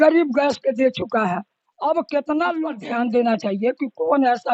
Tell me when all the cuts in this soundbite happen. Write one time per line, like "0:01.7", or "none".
0:02.7